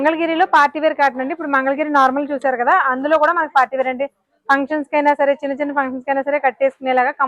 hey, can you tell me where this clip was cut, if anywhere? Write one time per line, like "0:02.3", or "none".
none